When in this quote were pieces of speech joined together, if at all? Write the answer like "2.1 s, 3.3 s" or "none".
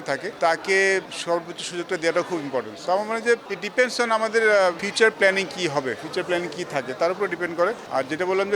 none